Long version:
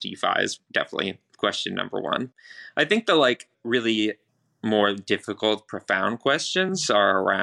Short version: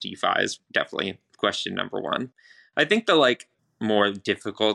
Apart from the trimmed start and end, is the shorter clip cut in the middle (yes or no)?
yes